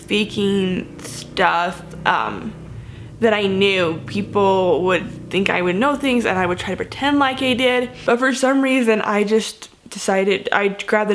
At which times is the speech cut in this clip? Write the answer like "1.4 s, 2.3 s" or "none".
7.9 s